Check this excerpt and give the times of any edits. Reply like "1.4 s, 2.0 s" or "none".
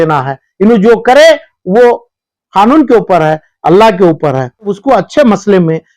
4.7 s